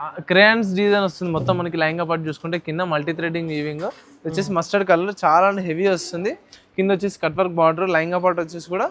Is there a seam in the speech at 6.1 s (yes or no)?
no